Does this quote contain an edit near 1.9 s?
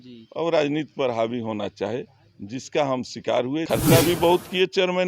no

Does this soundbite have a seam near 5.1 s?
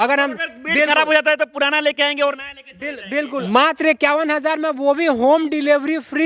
no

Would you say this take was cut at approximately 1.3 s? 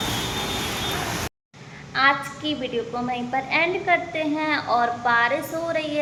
no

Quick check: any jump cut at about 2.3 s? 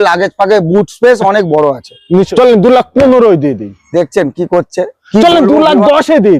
yes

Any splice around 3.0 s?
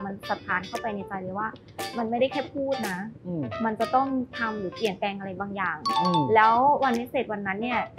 no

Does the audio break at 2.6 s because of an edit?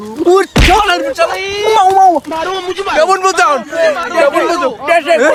no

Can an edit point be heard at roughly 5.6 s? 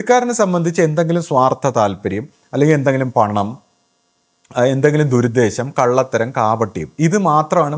no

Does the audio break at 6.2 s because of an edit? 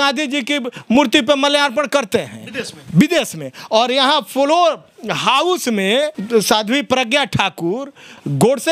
yes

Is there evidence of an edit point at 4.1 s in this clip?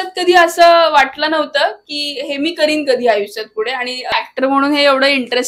yes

